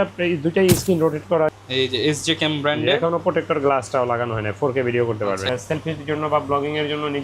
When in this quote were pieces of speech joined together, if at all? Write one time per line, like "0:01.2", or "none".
0:01.5
0:05.5